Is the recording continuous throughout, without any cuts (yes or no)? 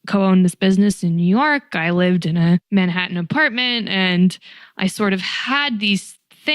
no